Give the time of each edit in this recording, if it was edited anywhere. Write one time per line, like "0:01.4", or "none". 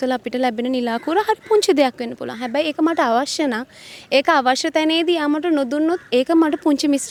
none